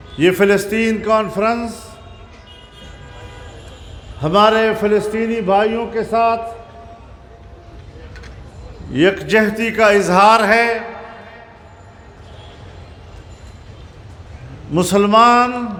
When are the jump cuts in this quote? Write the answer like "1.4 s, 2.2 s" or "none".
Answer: none